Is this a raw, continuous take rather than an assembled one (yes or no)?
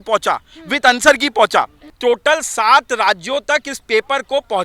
no